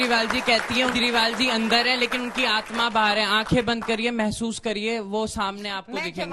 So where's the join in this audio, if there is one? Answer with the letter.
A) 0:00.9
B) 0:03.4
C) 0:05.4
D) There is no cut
A